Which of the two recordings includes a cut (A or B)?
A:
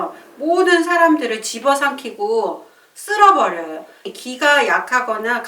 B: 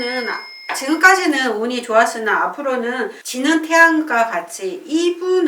A